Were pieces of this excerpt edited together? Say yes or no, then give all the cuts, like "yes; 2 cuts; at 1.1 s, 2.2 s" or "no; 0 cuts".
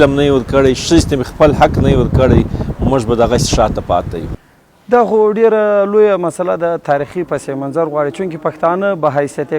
yes; 1 cut; at 4.2 s